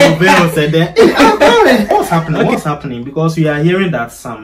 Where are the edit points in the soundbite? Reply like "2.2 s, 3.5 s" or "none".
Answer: 1.9 s